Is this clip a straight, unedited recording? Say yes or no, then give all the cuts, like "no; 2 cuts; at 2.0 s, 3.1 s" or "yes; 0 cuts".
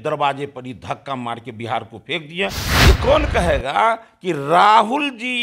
no; 1 cut; at 2.7 s